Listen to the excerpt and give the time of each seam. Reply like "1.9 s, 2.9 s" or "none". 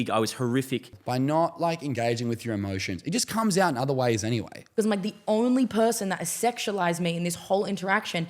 0.9 s, 4.6 s